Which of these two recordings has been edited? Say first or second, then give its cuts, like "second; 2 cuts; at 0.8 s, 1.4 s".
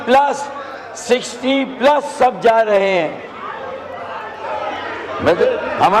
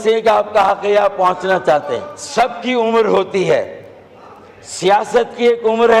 second; 1 cut; at 2.2 s